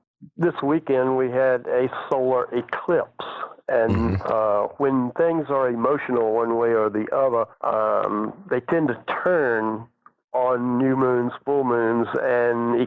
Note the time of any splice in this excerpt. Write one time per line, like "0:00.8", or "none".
0:09.7

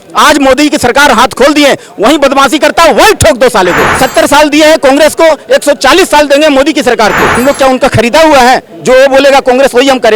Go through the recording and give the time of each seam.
0:03.9
0:07.3

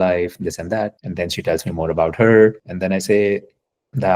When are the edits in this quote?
0:01.0
0:02.7

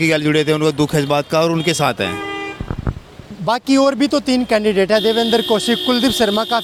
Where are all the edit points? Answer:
none

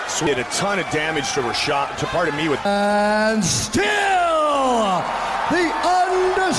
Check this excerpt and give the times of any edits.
none

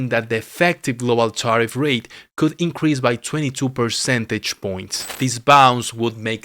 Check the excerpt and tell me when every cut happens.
0:05.1

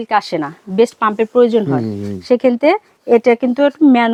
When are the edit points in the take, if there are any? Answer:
none

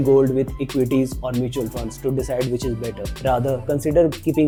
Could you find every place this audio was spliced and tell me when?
none

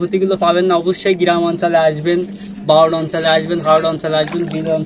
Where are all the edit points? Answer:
none

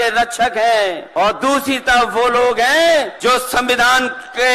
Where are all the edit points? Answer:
0:01.0
0:03.1

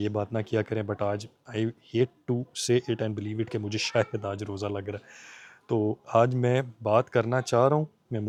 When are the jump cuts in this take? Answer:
none

